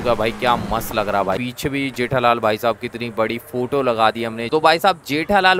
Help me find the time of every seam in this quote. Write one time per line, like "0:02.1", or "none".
0:01.4
0:04.4